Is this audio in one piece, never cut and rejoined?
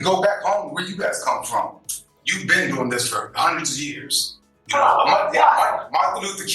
no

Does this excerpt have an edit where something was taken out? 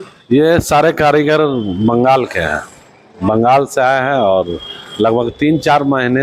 no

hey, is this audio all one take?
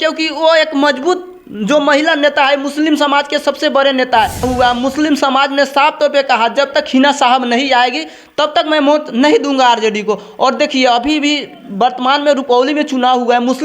no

